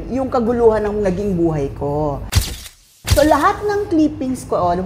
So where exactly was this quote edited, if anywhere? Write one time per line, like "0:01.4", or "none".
0:02.8